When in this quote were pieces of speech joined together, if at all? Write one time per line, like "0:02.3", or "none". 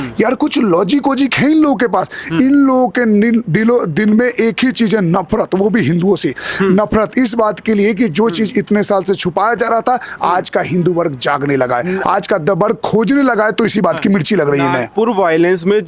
none